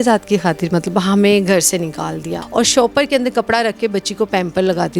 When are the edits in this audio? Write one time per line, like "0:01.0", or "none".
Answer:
0:02.3